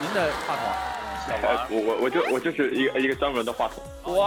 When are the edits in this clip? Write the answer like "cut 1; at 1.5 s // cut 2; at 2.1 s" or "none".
none